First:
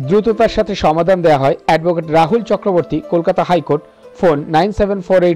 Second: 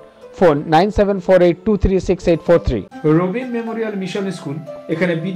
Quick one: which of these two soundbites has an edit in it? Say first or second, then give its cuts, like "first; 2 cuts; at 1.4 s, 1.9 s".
second; 1 cut; at 2.8 s